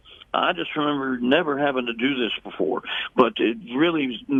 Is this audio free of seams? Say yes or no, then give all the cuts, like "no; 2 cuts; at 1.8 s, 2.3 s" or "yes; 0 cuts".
yes; 0 cuts